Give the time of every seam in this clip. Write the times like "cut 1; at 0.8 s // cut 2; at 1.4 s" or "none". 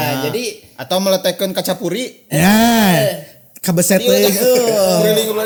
none